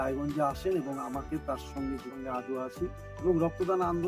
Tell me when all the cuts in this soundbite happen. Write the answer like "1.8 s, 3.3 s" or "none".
2.1 s